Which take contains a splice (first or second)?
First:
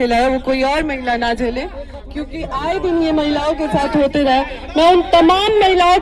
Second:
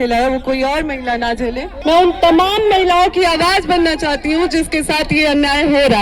second